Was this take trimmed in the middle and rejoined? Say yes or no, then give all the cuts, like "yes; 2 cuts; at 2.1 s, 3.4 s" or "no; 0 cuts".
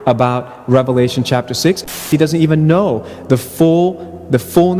yes; 1 cut; at 1.8 s